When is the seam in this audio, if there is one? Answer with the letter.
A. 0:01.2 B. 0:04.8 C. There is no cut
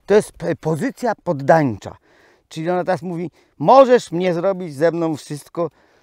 A